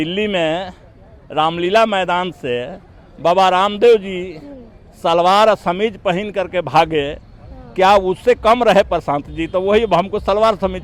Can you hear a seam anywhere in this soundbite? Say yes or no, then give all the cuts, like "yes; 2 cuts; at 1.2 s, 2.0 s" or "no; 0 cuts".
no; 0 cuts